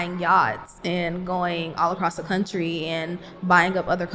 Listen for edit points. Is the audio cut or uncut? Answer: uncut